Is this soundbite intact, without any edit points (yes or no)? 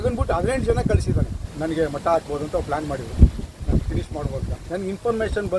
no